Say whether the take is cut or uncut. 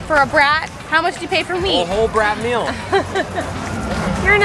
uncut